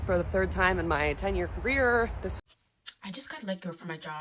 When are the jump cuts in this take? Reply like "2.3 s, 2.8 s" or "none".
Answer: 2.4 s